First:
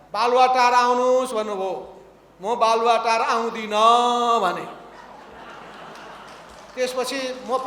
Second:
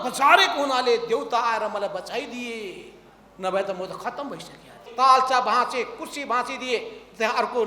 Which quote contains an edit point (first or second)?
second